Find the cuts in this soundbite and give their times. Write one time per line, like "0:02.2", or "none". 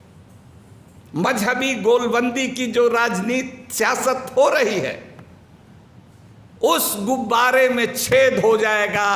none